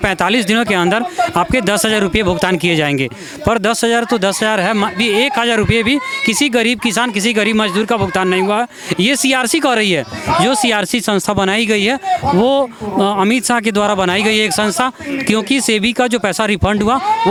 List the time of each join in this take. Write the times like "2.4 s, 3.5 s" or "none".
none

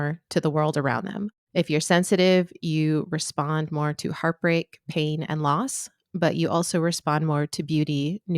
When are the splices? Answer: 1.3 s

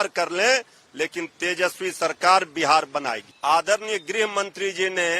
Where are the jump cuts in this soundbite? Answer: 3.2 s

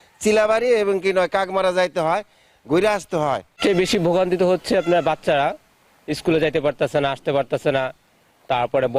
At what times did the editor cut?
none

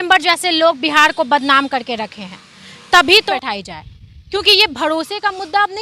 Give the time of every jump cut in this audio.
3.2 s

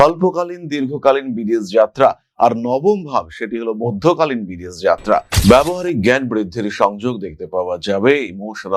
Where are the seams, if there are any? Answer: 5.3 s

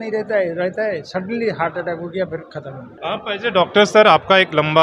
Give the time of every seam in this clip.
2.9 s

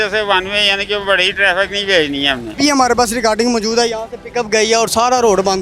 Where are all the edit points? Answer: 2.4 s

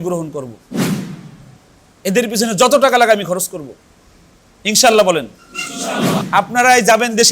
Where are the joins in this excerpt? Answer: 6.2 s

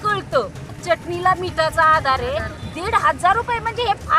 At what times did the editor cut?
0.8 s, 2.5 s

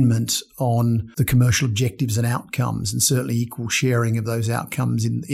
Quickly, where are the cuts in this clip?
1.1 s

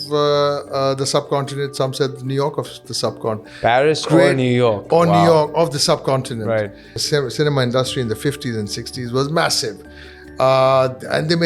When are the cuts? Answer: 3.5 s, 6.9 s

